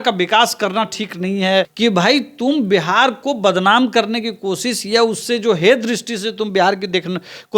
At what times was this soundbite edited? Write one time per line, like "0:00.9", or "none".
0:01.7